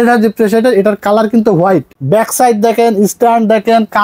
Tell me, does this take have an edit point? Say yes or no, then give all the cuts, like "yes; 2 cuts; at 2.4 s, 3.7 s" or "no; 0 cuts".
yes; 1 cut; at 1.9 s